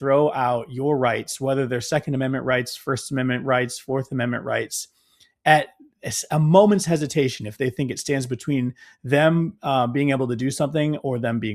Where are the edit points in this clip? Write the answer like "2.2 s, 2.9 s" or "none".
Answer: none